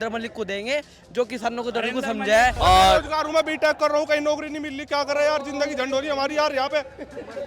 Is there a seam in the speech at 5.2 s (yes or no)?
no